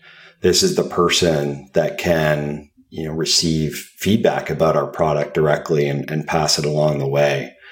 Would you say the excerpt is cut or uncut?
uncut